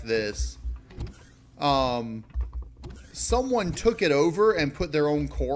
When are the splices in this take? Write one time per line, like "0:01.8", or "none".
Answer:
none